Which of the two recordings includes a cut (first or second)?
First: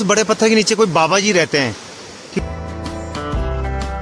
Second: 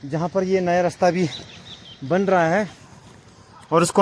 first